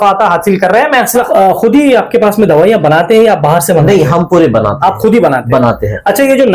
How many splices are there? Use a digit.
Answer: 1